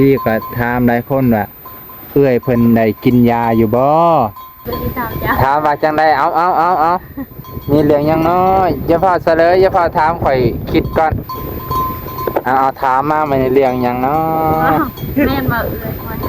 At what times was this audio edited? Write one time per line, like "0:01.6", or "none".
0:04.8